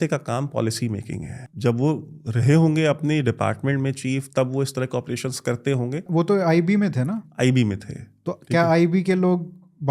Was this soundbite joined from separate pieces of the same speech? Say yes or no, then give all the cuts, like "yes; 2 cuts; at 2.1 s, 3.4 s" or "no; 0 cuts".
yes; 2 cuts; at 1.4 s, 6.1 s